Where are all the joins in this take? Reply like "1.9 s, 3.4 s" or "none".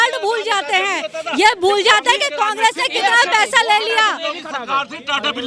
none